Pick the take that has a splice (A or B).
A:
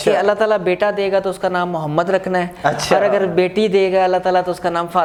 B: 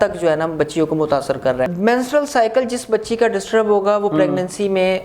B